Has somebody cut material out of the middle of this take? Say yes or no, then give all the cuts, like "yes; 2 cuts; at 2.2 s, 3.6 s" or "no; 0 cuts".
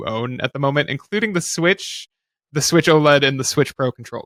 no; 0 cuts